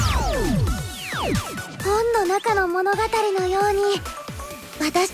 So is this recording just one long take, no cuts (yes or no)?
no